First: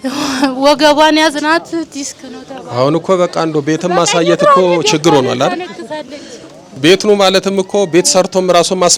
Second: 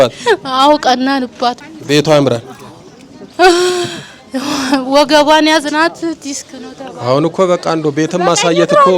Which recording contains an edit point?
second; 1 cut; at 1.6 s

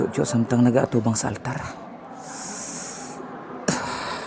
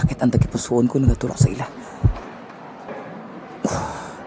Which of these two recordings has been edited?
second; 1 cut; at 2.9 s

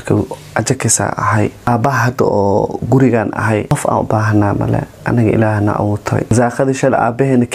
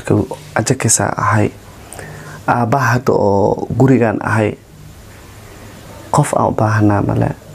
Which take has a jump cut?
first; 3 cuts; at 1.7 s, 3.7 s, 6.3 s

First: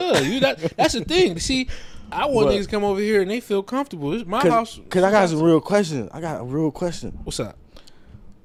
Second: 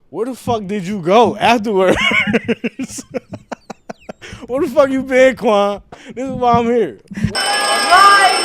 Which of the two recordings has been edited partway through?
second; 1 cut; at 7.3 s

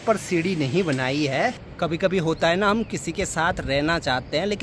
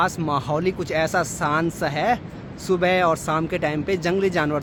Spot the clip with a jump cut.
first; 1 cut; at 1.7 s

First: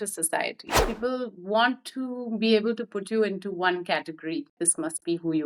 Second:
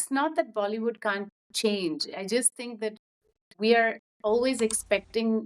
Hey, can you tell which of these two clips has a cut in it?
first; 2 cuts; at 0.8 s, 4.6 s

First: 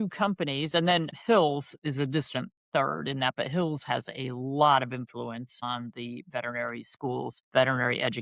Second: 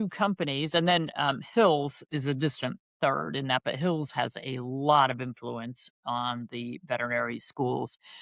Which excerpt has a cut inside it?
first; 3 cuts; at 1.1 s, 5.6 s, 7.4 s

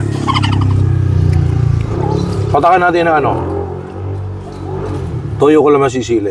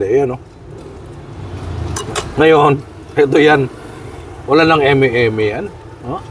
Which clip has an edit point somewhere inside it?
first; 1 cut; at 1.9 s

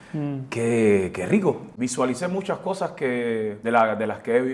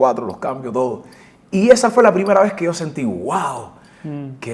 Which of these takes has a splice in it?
first; 2 cuts; at 1.7 s, 3.6 s

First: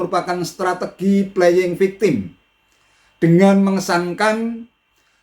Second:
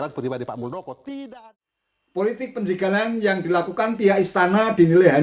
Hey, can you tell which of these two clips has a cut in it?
second; 1 cut; at 1.4 s

